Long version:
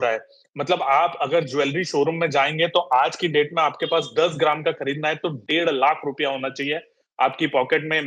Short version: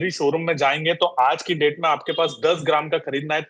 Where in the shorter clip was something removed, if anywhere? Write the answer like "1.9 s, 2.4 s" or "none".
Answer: none